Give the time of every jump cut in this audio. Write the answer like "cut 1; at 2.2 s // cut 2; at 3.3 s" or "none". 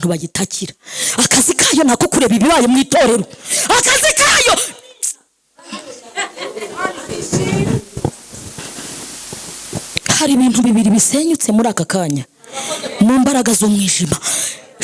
none